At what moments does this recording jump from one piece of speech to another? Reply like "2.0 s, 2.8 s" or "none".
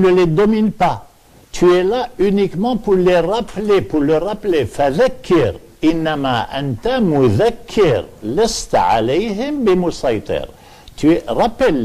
5.9 s